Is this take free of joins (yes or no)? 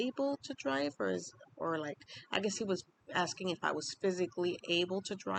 yes